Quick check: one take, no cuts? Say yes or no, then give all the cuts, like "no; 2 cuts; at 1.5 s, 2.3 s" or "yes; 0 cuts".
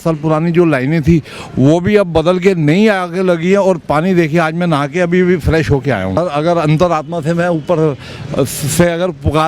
no; 1 cut; at 6.2 s